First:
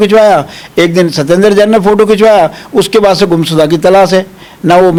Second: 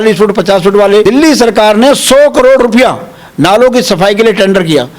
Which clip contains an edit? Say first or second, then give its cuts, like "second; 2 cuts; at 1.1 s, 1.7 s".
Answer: second; 1 cut; at 1.0 s